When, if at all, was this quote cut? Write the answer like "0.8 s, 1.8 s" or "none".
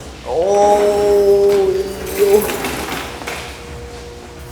3.2 s